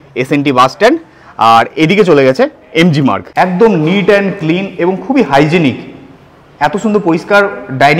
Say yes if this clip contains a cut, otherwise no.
yes